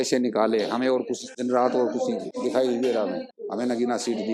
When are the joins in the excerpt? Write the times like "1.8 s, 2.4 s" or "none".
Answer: 1.3 s, 2.3 s, 3.3 s